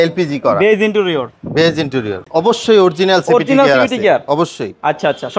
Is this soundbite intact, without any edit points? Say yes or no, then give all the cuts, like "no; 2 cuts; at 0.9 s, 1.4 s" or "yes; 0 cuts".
no; 1 cut; at 2.2 s